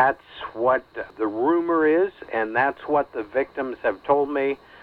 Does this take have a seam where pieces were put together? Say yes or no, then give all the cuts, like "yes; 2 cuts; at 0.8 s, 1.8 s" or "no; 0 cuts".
yes; 1 cut; at 1.1 s